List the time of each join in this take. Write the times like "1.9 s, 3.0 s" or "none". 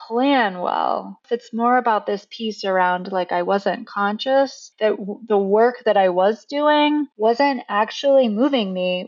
1.2 s, 4.6 s, 7.1 s